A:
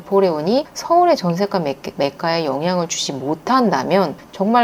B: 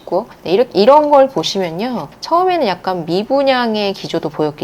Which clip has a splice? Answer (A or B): B